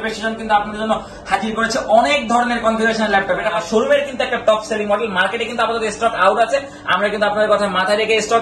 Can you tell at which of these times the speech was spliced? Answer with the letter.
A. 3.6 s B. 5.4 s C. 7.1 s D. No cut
A